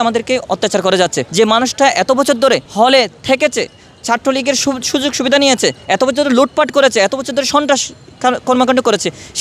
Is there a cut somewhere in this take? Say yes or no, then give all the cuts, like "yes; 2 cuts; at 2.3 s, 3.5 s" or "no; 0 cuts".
yes; 2 cuts; at 1.2 s, 2.7 s